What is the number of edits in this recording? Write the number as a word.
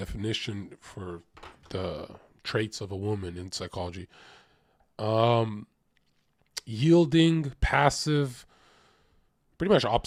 zero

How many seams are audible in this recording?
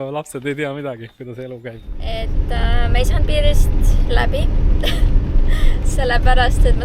one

